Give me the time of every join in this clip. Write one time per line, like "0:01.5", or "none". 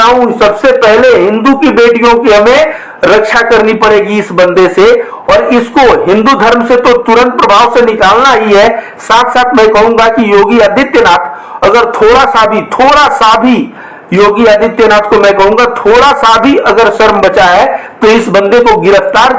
none

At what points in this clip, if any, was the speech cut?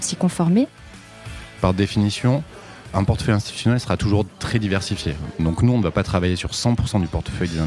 0:01.3

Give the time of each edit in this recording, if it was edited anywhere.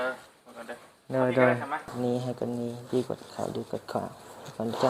0:01.9

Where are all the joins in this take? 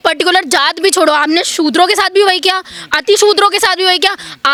none

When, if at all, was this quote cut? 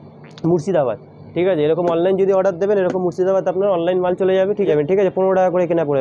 0:04.7

